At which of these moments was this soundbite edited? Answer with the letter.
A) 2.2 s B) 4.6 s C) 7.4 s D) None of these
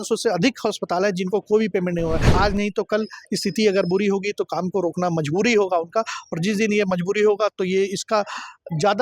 A